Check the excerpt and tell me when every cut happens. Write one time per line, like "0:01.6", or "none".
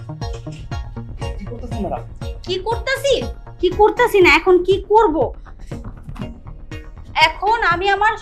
none